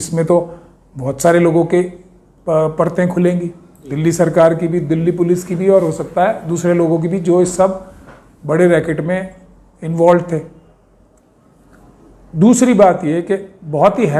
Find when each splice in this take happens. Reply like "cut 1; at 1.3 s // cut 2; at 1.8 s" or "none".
none